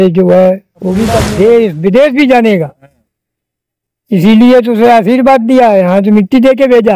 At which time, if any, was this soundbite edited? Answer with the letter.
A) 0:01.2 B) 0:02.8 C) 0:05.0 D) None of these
A